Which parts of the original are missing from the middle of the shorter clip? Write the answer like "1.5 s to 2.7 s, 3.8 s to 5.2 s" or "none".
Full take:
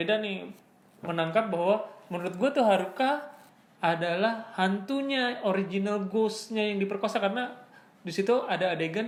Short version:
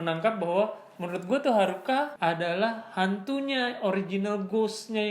3.2 s to 3.7 s